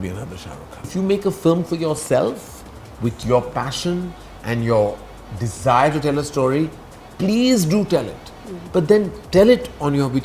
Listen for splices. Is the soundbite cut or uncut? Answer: cut